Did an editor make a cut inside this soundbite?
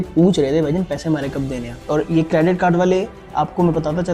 no; 0 cuts

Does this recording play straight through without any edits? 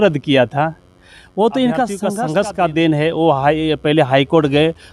no; 1 cut; at 2.1 s

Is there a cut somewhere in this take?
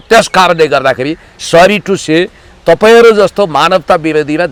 no; 0 cuts

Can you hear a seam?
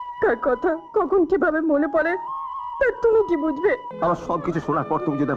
yes; 1 cut; at 3.9 s

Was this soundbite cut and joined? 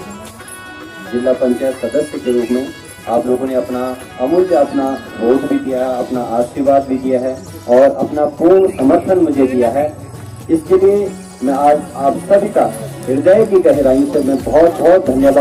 no; 0 cuts

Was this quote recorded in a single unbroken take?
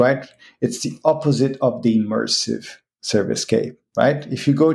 yes; 0 cuts

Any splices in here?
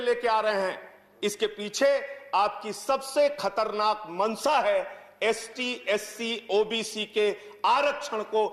no; 0 cuts

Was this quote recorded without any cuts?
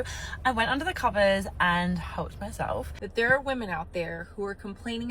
no; 1 cut; at 3.0 s

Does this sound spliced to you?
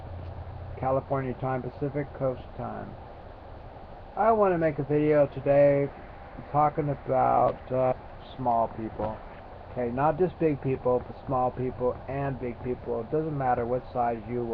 no; 0 cuts

